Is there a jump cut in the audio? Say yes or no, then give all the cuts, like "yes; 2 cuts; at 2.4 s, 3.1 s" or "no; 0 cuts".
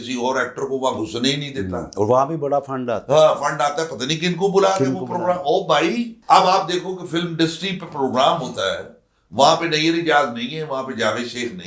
yes; 1 cut; at 6.1 s